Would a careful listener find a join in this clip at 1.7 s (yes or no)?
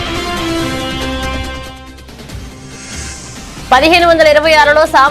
no